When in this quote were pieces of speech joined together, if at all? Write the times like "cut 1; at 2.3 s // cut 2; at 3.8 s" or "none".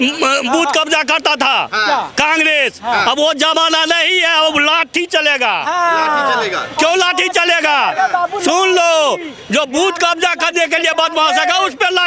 none